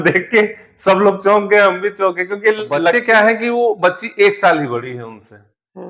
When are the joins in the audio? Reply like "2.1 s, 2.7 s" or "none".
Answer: 2.9 s